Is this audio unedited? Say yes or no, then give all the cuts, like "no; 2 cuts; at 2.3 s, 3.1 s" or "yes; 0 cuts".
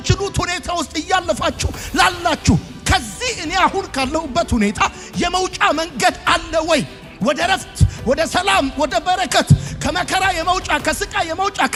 yes; 0 cuts